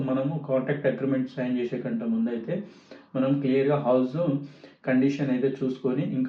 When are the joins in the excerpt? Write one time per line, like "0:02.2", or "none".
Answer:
none